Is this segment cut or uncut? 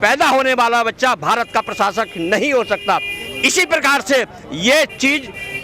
uncut